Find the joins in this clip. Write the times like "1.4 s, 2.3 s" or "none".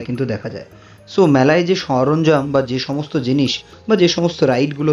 none